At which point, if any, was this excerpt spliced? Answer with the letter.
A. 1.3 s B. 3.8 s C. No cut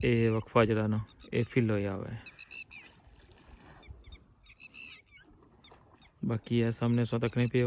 C